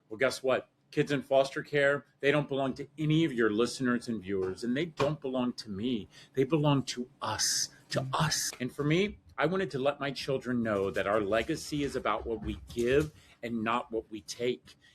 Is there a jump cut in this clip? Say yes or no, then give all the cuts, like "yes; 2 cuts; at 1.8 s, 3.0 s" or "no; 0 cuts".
yes; 1 cut; at 8.4 s